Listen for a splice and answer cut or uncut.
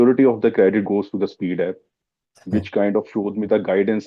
uncut